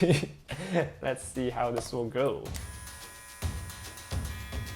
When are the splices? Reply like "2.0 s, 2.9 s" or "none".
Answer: 2.5 s